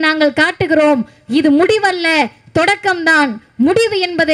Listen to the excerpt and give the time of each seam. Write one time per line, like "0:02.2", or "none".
none